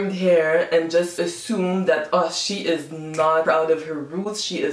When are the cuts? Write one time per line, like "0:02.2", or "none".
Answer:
0:03.4